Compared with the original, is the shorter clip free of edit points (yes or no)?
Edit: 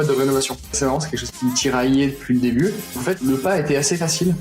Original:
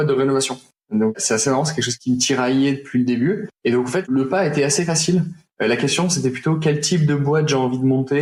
no